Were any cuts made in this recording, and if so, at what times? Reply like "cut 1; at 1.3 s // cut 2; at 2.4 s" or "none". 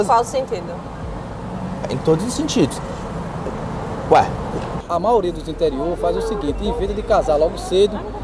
cut 1; at 4.8 s